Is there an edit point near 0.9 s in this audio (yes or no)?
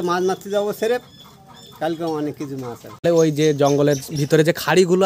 no